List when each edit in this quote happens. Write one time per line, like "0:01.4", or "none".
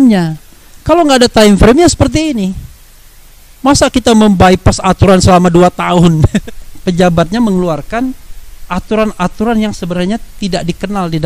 0:06.5

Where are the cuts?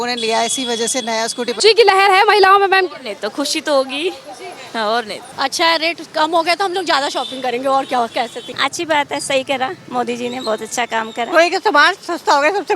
0:01.6
0:05.2
0:08.5
0:11.3

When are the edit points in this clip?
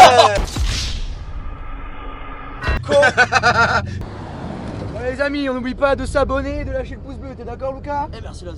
0:04.0

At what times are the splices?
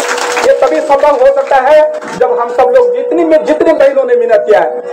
none

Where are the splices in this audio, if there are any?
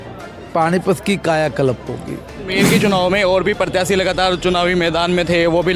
0:02.4

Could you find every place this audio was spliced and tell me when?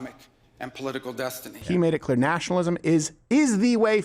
0:01.6

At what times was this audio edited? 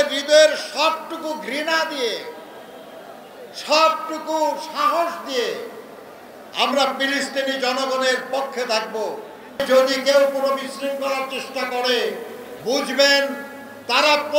0:09.6

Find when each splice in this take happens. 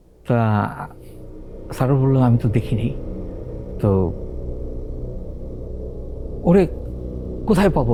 none

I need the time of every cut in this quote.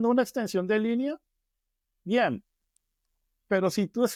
none

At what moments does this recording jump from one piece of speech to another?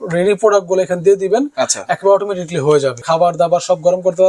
0:03.0

